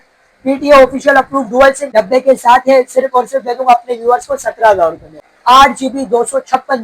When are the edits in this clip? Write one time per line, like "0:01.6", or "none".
0:01.9
0:05.3